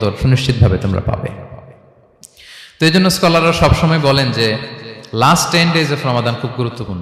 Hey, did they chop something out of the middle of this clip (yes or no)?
no